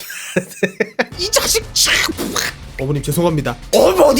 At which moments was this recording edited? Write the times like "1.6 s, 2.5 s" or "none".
1.1 s